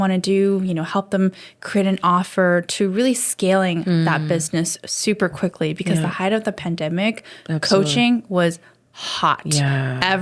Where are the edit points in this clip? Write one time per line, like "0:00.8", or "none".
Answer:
none